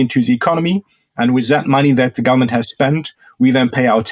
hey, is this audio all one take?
yes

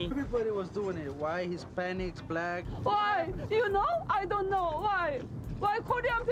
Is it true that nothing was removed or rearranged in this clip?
yes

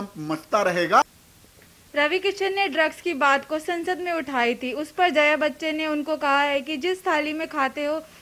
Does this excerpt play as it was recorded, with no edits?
yes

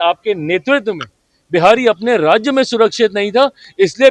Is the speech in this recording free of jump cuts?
yes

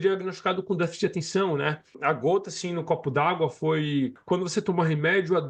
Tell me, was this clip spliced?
yes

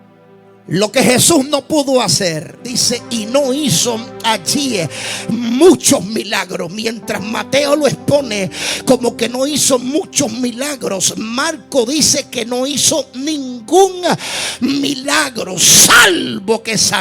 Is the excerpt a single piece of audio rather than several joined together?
no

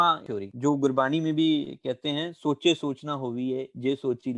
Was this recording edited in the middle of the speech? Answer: no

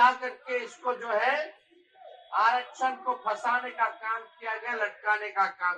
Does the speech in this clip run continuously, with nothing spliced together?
yes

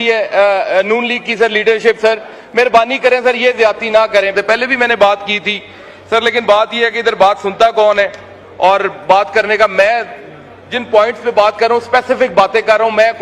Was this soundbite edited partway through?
yes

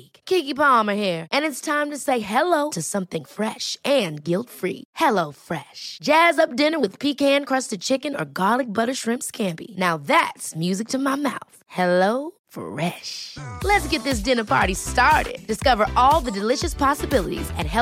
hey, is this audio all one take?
yes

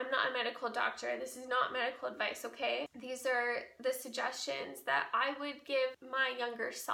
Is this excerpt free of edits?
no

